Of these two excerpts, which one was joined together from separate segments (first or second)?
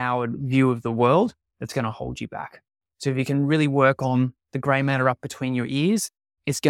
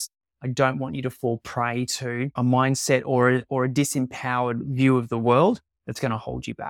second